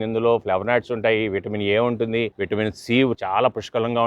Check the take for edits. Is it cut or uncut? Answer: cut